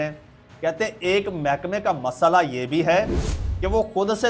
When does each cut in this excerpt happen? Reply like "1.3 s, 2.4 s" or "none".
none